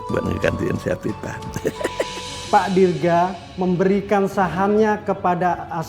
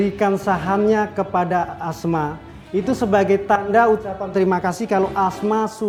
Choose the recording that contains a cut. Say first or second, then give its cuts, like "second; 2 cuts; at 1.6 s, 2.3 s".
first; 1 cut; at 2.3 s